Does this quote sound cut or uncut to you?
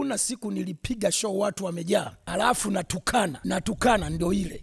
cut